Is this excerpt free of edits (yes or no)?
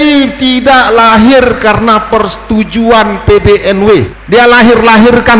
no